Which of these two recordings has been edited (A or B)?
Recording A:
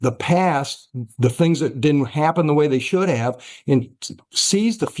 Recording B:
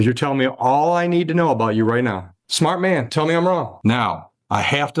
B